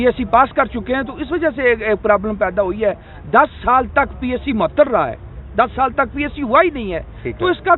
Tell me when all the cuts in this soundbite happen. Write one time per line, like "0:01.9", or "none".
none